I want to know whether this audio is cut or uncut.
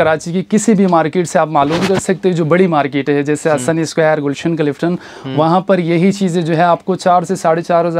uncut